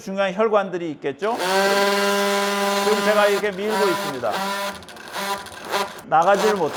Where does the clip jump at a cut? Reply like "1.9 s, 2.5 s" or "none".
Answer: none

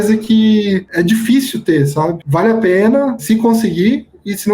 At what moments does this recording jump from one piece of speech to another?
2.2 s, 3.2 s

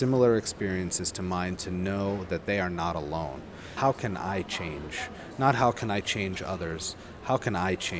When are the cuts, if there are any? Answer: 3.7 s

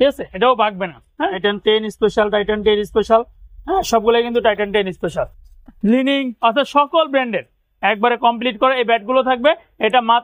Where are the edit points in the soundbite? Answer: 1.4 s, 5.4 s

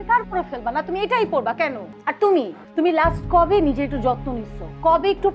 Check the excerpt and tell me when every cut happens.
1.9 s, 2.6 s

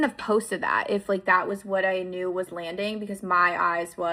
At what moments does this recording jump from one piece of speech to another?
none

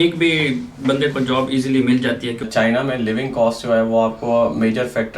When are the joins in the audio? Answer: 2.5 s

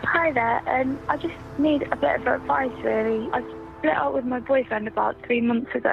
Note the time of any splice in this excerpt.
3.3 s

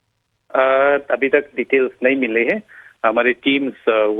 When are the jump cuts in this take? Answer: none

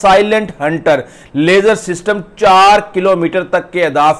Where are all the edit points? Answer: none

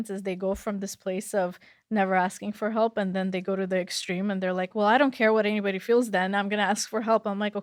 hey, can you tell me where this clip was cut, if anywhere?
none

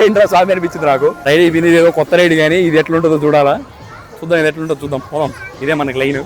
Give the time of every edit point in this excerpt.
1.2 s

